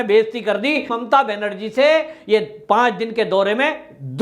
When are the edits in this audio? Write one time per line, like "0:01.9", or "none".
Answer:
0:01.0